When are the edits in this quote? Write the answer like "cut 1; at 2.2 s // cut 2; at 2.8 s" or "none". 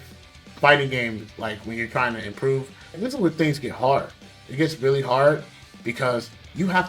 cut 1; at 3.0 s